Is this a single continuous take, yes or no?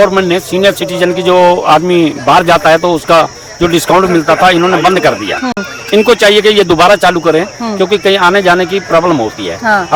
yes